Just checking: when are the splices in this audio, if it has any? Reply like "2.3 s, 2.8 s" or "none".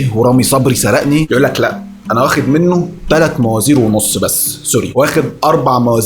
1.3 s